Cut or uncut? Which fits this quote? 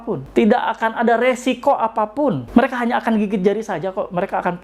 uncut